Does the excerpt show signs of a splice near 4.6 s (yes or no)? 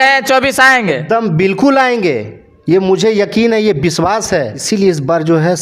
yes